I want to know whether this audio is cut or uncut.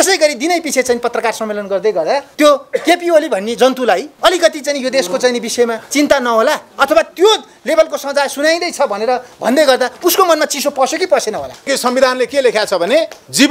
cut